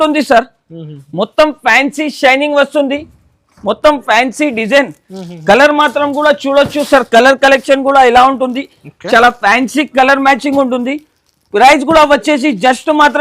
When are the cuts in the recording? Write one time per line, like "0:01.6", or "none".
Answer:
none